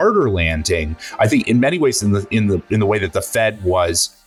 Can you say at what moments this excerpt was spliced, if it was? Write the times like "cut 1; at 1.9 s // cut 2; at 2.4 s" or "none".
none